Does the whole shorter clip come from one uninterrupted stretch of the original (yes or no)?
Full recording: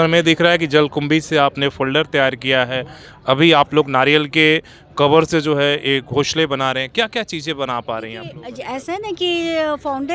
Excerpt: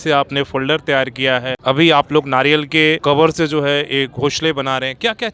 no